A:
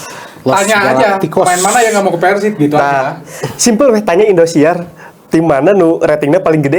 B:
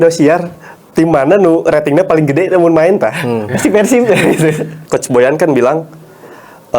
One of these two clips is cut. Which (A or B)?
B